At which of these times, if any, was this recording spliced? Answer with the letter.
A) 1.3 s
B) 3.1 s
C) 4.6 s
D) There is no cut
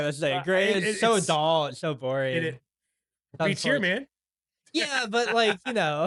D